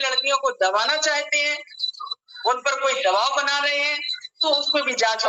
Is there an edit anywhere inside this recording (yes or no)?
no